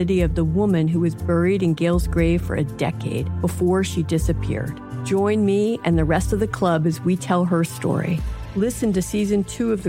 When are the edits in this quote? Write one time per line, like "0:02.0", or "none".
none